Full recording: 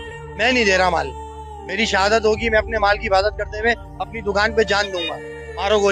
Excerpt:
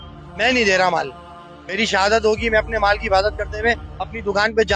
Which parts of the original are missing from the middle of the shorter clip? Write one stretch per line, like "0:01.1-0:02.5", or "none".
none